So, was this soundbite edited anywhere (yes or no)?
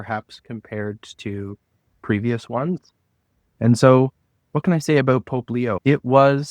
yes